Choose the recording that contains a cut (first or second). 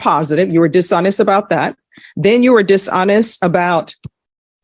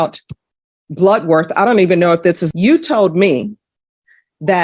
second